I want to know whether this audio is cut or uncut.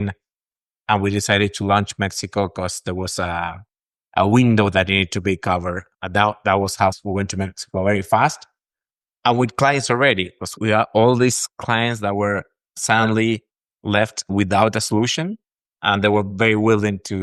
uncut